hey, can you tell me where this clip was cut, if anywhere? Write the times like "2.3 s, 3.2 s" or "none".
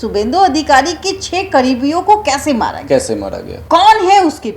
3.5 s